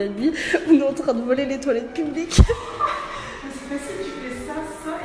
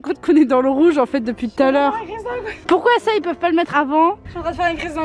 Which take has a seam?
second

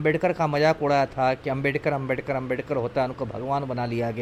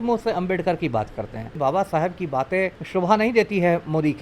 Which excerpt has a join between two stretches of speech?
second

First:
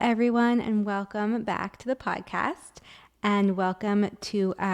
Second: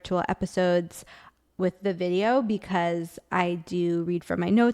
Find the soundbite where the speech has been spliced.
second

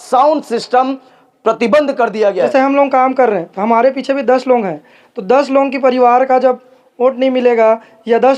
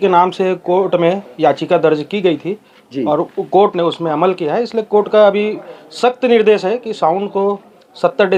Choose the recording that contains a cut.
first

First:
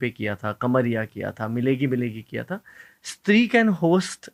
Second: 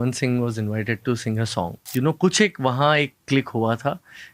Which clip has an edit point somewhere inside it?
second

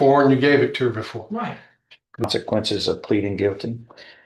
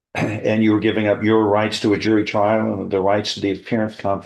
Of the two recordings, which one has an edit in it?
first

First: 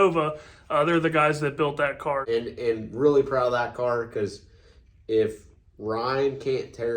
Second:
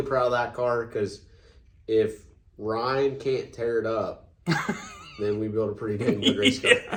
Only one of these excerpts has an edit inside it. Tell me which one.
first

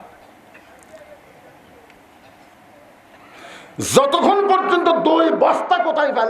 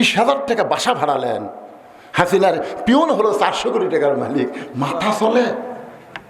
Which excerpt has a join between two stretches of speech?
first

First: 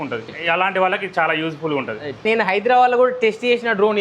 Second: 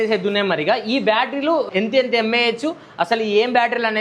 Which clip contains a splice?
first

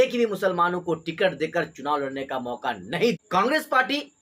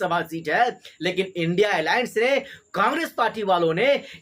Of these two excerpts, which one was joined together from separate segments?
first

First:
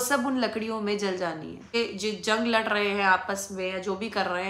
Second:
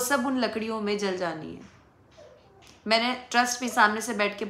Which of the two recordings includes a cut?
first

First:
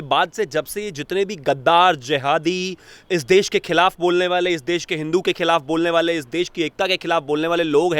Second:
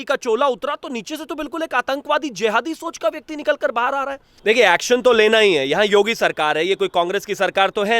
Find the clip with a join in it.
second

